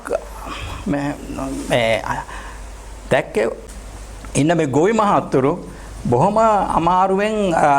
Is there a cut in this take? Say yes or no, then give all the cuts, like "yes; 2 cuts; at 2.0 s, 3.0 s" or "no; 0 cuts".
yes; 1 cut; at 3.6 s